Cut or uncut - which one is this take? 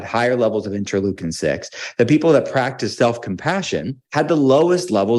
cut